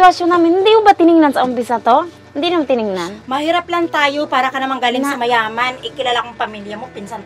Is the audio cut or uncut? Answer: cut